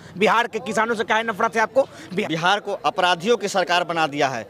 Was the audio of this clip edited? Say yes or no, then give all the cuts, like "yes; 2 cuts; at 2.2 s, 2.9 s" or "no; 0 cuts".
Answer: yes; 1 cut; at 2.1 s